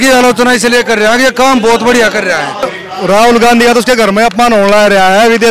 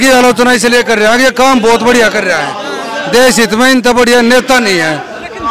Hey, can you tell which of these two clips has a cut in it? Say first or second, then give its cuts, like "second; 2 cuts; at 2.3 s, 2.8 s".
first; 1 cut; at 2.8 s